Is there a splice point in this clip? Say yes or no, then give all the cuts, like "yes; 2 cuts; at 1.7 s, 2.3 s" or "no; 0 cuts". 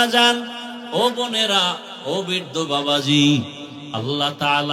no; 0 cuts